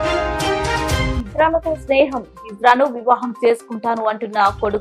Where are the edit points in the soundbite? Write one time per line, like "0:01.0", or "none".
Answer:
0:01.1